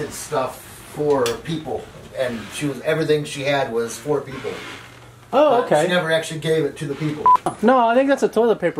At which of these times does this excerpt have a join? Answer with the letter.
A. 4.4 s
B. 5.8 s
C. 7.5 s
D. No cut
C